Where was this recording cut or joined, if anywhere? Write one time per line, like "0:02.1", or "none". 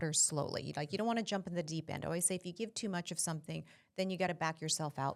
none